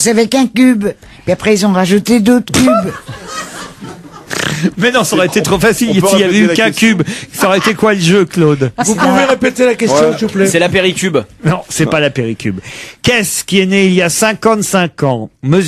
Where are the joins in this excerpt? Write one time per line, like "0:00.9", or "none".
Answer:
0:06.9